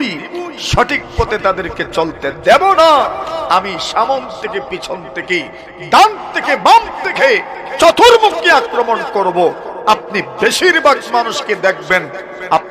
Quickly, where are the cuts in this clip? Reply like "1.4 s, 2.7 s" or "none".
none